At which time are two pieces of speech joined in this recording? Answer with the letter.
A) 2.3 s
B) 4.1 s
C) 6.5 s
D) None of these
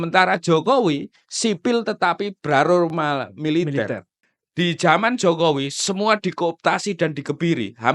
B